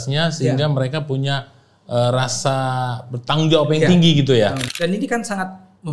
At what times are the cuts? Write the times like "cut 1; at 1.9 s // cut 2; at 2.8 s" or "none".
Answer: cut 1; at 4.6 s